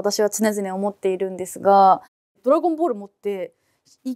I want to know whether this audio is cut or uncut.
uncut